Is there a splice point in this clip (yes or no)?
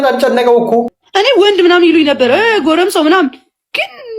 yes